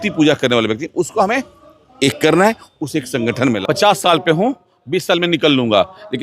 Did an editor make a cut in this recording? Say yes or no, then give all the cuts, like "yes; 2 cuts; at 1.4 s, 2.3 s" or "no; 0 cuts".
yes; 1 cut; at 3.6 s